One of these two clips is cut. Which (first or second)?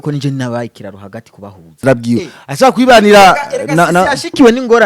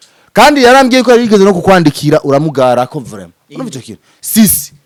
first